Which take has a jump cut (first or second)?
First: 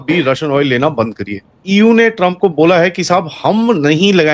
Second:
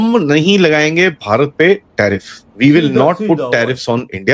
first